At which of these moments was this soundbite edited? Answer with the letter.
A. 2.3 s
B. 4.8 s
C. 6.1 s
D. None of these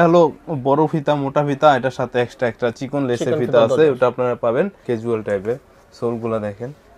B